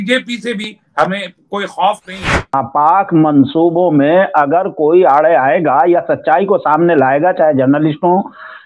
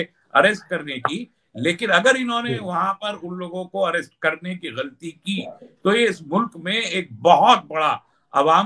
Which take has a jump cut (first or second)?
first